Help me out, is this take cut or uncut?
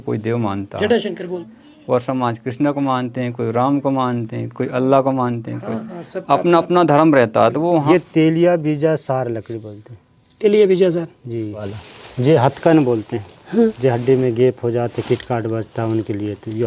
cut